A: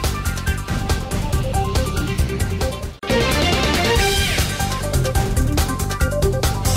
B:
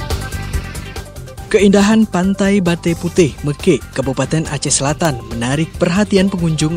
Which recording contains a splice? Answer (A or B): B